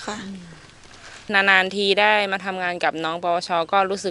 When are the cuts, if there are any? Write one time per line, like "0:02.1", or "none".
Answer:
0:01.2